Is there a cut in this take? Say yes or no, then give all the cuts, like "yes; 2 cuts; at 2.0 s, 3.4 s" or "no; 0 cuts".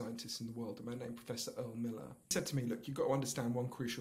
yes; 1 cut; at 2.3 s